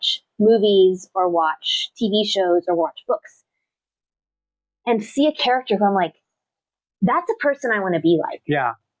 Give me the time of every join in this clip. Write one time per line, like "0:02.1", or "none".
none